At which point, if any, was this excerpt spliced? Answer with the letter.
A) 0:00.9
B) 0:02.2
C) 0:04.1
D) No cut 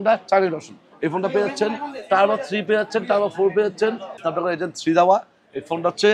C